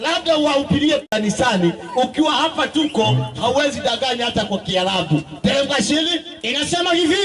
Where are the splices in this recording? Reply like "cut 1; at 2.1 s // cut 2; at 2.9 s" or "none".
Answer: cut 1; at 1.1 s